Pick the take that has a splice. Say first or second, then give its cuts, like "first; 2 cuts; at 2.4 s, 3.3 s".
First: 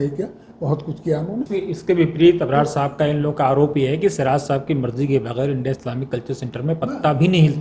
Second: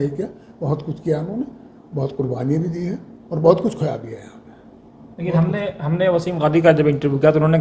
first; 1 cut; at 1.5 s